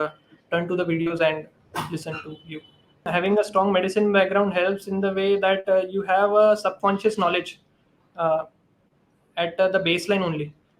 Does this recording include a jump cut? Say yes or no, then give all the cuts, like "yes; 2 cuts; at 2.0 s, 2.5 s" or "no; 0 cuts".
yes; 1 cut; at 3.1 s